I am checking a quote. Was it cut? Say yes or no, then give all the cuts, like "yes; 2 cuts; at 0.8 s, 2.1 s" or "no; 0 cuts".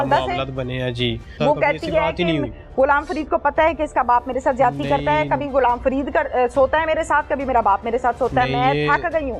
yes; 1 cut; at 1.3 s